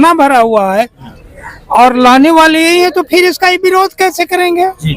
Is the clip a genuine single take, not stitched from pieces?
yes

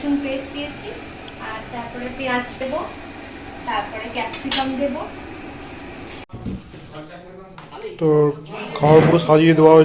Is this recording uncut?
no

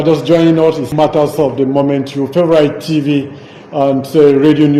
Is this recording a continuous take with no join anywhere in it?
no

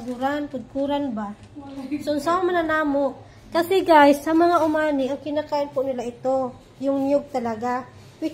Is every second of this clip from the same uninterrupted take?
yes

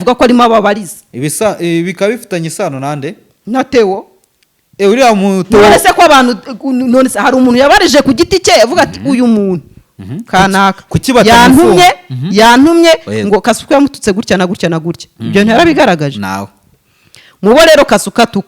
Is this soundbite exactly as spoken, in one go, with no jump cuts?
yes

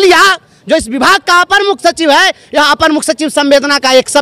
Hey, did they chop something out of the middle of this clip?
no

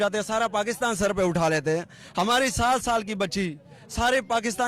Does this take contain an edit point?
no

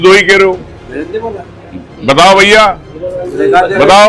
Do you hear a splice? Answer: no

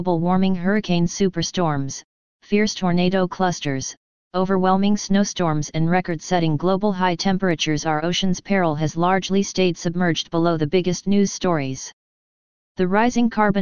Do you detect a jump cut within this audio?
yes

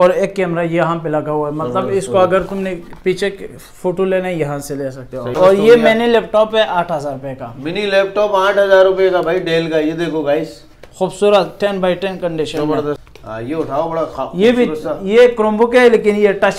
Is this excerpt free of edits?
no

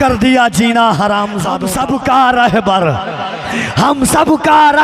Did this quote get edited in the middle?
yes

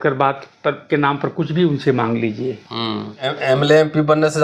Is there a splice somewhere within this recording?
yes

